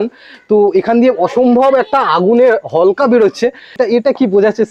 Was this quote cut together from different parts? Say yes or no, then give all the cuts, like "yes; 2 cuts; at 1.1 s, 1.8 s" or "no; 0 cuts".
yes; 1 cut; at 3.8 s